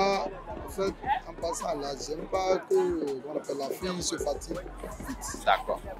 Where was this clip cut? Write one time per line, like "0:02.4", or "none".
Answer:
none

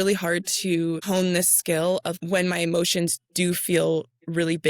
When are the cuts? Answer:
0:01.0
0:02.2

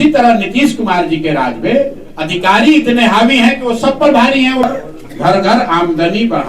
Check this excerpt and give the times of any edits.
0:04.6

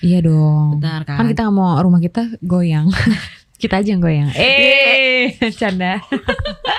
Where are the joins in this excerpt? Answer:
none

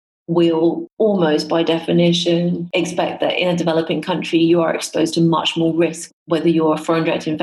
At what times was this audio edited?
0:00.9
0:02.6
0:06.1

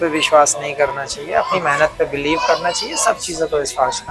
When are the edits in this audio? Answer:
none

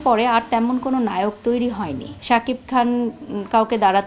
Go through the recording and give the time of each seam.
0:02.1

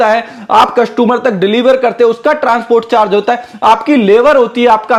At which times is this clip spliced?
none

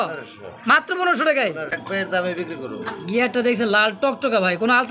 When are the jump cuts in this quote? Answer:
0:01.8

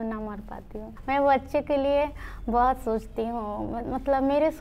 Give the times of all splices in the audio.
0:00.9

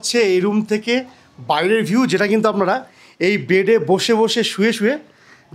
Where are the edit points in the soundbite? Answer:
none

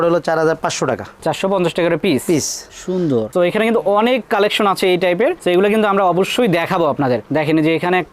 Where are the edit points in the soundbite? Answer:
0:03.3

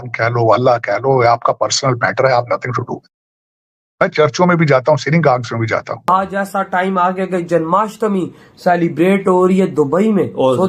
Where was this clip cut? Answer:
0:06.1

